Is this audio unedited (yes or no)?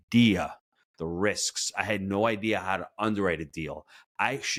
yes